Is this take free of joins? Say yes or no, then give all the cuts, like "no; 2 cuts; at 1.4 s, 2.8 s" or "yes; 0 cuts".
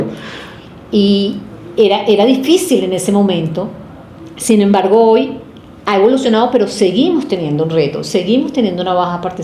yes; 0 cuts